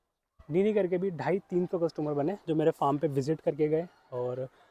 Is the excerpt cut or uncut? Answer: uncut